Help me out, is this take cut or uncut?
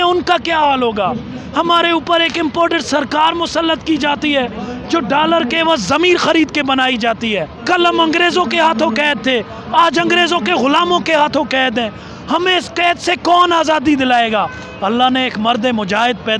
cut